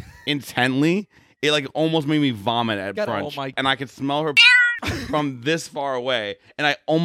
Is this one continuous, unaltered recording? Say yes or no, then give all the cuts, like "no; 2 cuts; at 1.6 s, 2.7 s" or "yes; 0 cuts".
no; 1 cut; at 3.5 s